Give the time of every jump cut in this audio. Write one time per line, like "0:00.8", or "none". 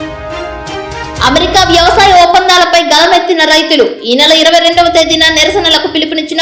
0:01.2